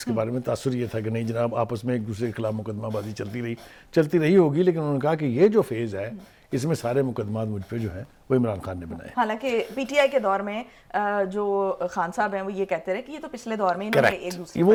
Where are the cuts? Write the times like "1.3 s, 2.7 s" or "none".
none